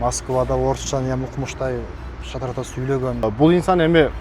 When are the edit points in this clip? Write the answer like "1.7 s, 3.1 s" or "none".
3.2 s

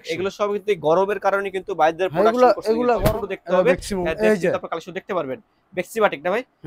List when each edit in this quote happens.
3.0 s

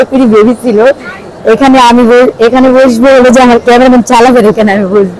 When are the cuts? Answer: none

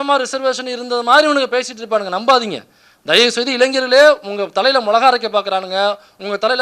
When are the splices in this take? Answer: none

